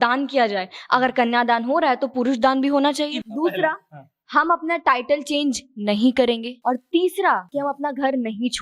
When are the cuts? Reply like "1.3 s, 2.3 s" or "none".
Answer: 3.2 s, 6.5 s